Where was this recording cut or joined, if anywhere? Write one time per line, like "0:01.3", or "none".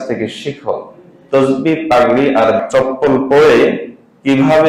0:02.6